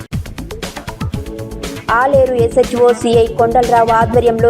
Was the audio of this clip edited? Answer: yes; 1 cut; at 1.1 s

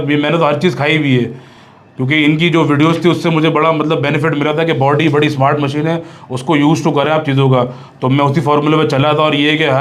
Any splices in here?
no; 0 cuts

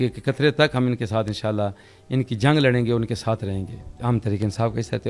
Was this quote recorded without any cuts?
no; 1 cut; at 3.9 s

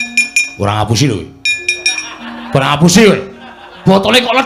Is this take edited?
no; 0 cuts

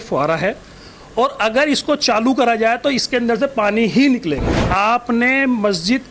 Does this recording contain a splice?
yes; 1 cut; at 4.6 s

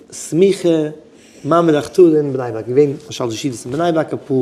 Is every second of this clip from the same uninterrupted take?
yes; 0 cuts

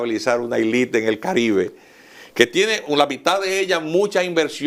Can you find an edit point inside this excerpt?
no; 0 cuts

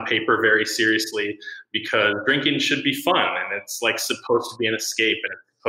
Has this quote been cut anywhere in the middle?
no; 0 cuts

